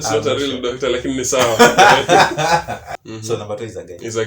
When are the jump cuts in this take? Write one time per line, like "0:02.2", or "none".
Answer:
0:02.8